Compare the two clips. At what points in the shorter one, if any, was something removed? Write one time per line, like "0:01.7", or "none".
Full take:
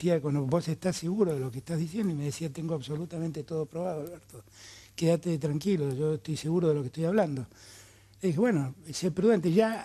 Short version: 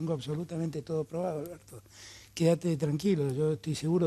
none